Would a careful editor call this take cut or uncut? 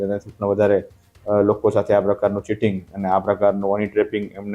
uncut